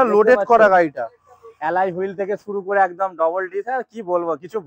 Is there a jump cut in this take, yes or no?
no